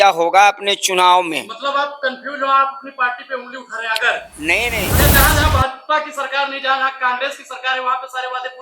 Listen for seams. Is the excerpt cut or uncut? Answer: cut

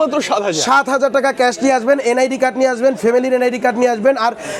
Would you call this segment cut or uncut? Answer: uncut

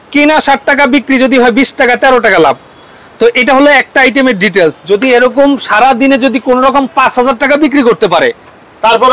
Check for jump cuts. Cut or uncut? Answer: uncut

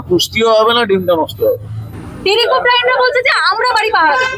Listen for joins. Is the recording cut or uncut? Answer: uncut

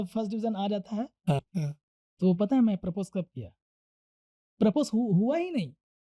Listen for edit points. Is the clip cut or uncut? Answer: cut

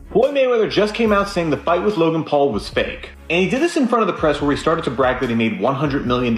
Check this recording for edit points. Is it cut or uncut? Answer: uncut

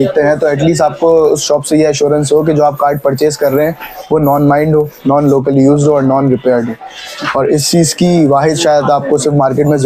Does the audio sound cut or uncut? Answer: uncut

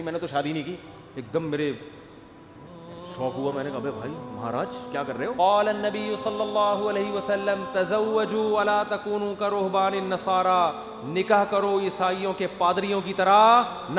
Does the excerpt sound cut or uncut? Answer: cut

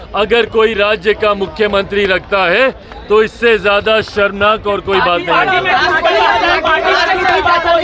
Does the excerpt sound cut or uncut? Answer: uncut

